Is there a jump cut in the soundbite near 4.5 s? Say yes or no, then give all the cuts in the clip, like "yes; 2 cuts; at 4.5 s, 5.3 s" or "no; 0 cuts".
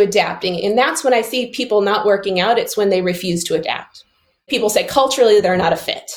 yes; 1 cut; at 4.5 s